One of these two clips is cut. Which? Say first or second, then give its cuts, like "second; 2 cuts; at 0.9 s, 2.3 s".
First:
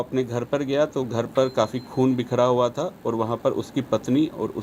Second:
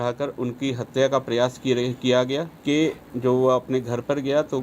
second; 1 cut; at 2.5 s